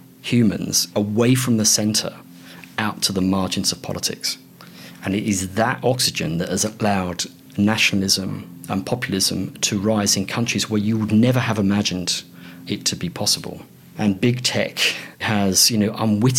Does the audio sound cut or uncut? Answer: cut